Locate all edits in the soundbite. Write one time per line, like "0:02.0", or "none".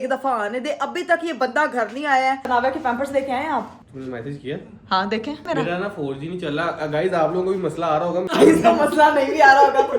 0:02.5
0:05.4
0:08.3